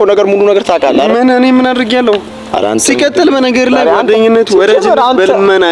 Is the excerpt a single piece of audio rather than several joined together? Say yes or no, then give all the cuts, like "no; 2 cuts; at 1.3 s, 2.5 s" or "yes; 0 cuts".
yes; 0 cuts